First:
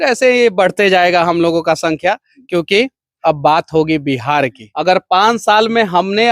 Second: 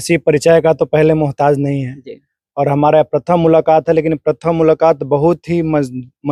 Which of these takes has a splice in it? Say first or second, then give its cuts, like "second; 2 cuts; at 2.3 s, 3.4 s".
first; 1 cut; at 4.6 s